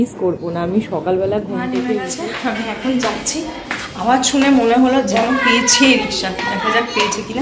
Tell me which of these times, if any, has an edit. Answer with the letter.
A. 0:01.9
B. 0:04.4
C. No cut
A